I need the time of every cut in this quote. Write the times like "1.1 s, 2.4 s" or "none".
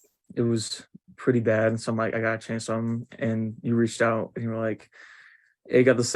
none